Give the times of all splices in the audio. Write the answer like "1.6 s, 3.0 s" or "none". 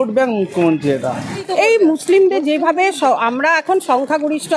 1.3 s